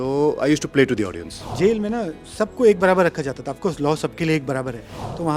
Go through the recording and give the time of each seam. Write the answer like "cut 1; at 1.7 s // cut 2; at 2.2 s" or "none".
cut 1; at 1.4 s